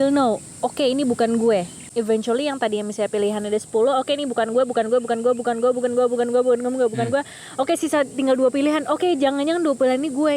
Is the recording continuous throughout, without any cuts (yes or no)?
no